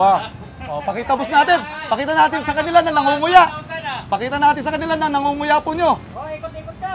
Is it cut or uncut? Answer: uncut